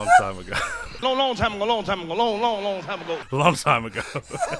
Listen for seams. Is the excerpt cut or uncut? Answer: uncut